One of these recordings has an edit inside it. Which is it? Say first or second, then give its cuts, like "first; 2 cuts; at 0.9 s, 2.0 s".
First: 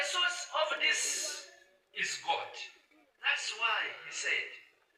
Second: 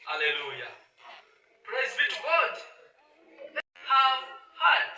second; 1 cut; at 3.9 s